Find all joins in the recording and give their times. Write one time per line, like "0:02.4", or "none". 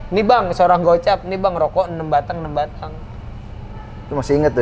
none